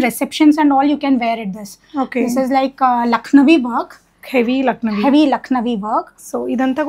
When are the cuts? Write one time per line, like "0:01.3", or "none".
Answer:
none